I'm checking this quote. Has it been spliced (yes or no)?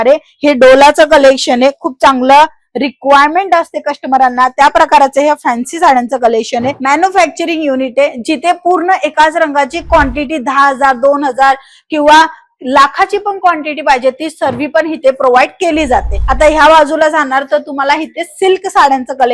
yes